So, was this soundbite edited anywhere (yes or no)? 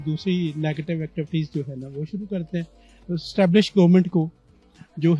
no